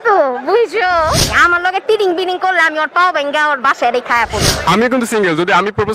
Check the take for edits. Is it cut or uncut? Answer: cut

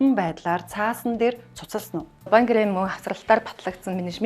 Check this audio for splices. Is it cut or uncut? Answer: cut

